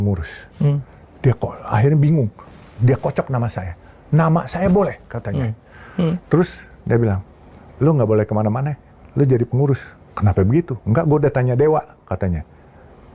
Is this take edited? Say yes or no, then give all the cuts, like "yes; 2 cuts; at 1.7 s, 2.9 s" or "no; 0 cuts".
no; 0 cuts